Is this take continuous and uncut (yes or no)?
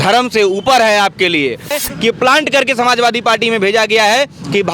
no